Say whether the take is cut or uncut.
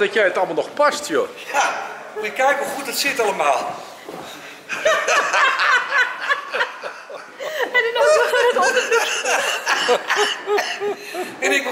uncut